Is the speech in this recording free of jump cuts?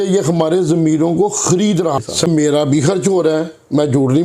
no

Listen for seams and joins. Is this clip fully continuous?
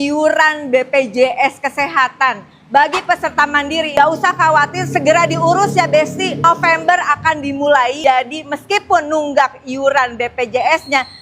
no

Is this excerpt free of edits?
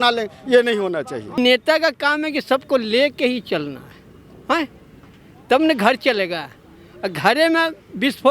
no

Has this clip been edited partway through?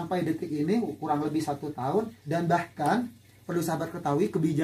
yes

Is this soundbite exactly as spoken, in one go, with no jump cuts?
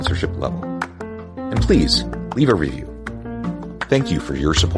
yes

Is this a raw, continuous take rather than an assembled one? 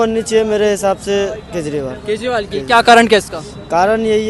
yes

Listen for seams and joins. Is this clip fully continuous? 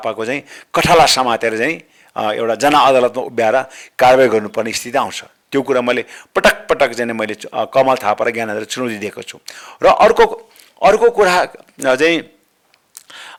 yes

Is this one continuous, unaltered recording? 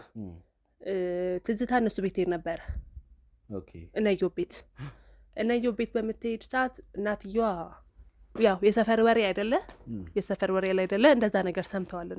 yes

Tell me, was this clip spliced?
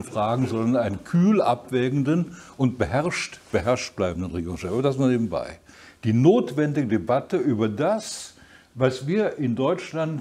yes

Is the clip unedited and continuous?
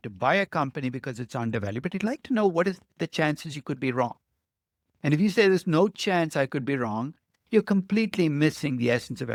yes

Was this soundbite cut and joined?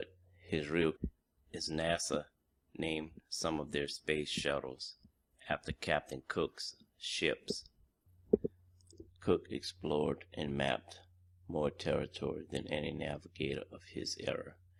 no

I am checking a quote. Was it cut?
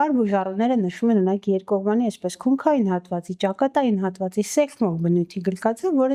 no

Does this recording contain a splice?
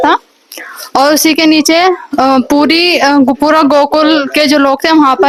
no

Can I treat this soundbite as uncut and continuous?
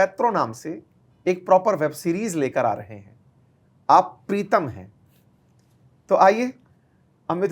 yes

